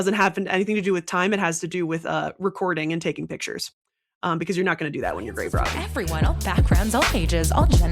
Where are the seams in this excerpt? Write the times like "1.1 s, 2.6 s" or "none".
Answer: 5.8 s